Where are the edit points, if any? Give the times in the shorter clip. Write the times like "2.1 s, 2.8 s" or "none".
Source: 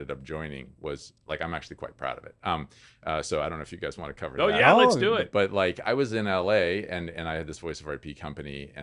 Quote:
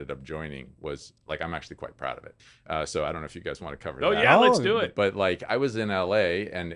2.3 s